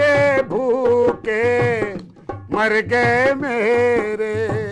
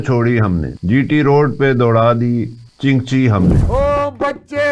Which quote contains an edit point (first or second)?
second